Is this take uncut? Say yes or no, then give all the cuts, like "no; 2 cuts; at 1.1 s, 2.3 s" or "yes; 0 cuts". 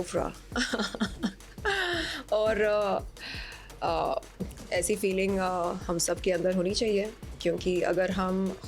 yes; 0 cuts